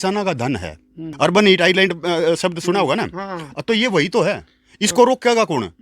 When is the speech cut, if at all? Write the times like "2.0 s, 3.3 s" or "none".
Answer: 1.0 s